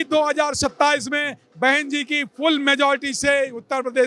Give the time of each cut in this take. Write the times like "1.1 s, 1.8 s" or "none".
none